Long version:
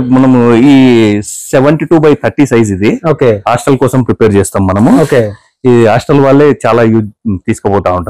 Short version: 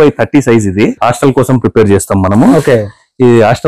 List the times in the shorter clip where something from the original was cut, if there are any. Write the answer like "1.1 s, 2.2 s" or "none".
1.0 s